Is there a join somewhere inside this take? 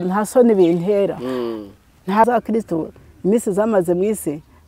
yes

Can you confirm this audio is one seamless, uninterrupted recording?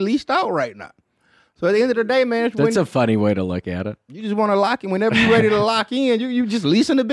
yes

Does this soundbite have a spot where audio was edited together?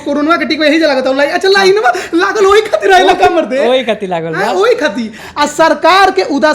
yes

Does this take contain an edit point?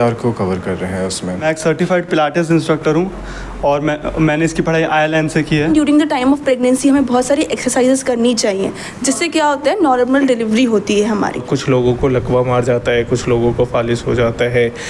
yes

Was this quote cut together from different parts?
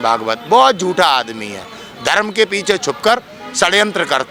no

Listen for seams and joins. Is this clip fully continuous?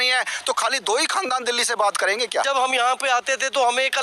no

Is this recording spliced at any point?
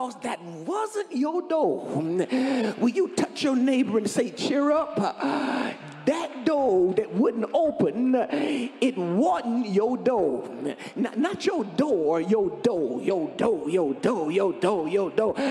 no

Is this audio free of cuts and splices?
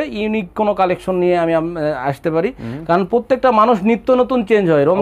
yes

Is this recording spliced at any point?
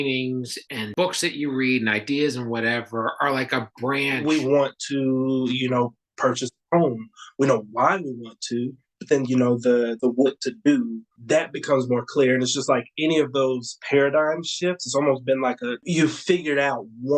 yes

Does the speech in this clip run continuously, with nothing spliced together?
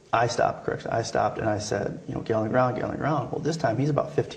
no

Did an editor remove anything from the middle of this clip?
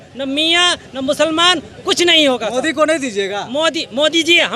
no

